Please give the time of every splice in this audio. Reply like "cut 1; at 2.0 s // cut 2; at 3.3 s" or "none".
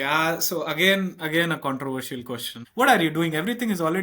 cut 1; at 2.6 s